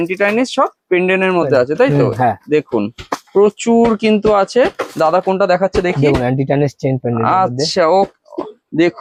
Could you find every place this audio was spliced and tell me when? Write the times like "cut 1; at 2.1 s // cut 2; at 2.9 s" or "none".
none

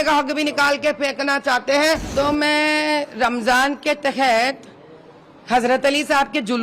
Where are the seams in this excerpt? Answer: cut 1; at 2.1 s

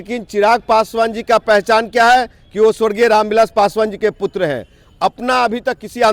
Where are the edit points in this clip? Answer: none

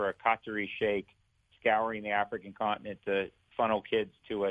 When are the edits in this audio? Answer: none

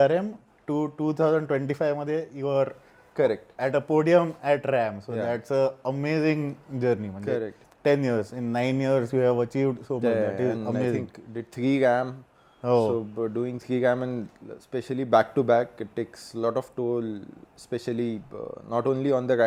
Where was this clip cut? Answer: none

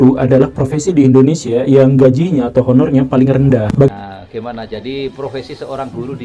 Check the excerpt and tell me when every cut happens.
cut 1; at 3.9 s

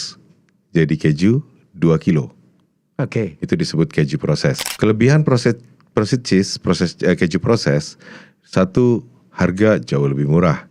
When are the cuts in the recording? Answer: cut 1; at 4.7 s

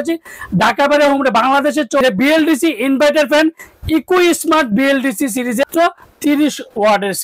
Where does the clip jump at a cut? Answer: cut 1; at 2.0 s // cut 2; at 5.6 s

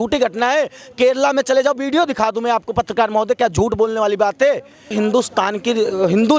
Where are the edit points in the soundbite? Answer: cut 1; at 4.8 s

